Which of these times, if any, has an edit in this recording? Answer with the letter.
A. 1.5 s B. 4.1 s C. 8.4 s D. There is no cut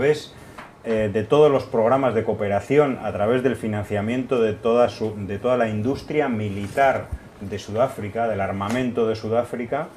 A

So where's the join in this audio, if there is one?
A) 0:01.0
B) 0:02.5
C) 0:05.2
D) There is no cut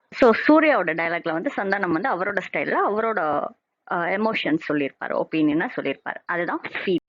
B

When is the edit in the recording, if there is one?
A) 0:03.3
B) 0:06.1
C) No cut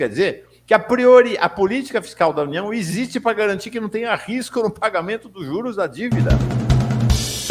B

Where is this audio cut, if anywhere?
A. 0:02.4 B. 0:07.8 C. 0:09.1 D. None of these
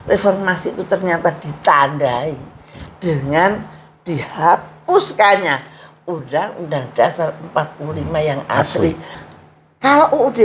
C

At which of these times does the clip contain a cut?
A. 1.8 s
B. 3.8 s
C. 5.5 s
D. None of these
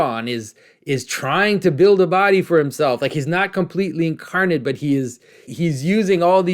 C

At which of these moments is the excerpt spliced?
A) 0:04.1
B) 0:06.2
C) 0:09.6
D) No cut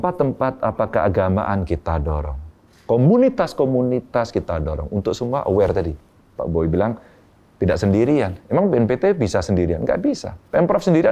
D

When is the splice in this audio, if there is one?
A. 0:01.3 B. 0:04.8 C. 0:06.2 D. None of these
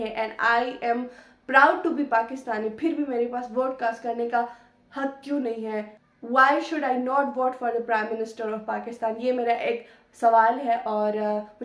D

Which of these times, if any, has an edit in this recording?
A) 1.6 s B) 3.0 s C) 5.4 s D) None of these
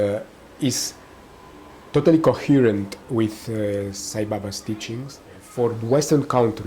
C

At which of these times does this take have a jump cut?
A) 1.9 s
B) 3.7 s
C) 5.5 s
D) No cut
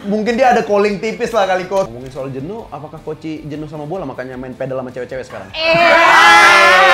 A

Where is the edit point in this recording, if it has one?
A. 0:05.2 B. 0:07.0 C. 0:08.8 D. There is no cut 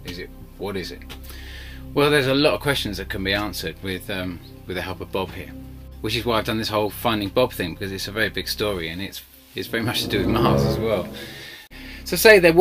C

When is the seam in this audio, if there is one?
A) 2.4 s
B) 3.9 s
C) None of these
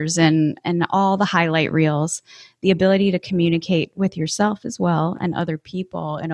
C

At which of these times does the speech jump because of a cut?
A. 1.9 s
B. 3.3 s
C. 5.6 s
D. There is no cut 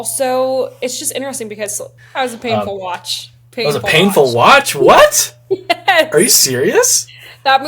A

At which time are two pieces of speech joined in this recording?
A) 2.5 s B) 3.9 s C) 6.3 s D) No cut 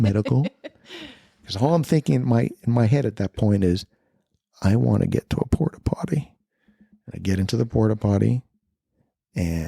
C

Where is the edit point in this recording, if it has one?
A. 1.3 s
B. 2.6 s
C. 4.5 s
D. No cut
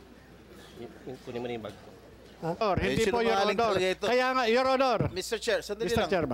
B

